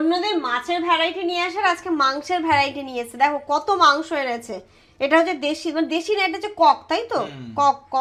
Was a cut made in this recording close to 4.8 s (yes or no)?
no